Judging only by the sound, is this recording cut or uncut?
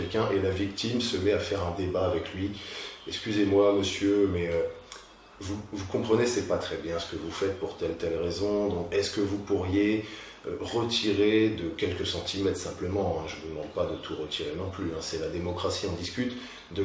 uncut